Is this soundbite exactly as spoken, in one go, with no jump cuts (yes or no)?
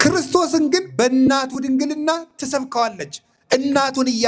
no